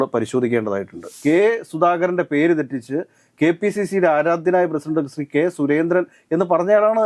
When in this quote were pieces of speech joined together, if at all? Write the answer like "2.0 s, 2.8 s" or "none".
1.1 s